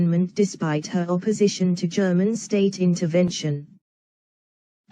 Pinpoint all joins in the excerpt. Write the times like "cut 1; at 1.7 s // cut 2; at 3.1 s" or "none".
cut 1; at 1.4 s